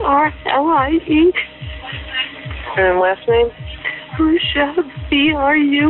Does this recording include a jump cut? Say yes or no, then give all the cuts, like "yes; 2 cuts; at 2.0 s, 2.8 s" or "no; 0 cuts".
no; 0 cuts